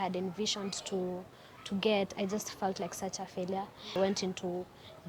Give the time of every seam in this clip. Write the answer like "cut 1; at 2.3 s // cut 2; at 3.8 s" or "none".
cut 1; at 3.9 s